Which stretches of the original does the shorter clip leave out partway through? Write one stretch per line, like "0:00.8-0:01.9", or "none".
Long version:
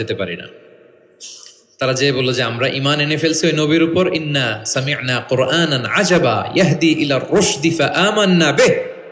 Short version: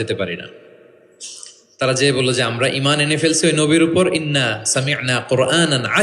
none